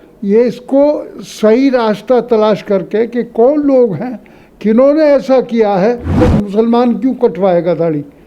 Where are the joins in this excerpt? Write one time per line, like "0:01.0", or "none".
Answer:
0:06.1